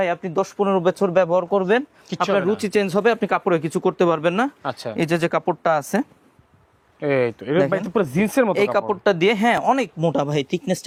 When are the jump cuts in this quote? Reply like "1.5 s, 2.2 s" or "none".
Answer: none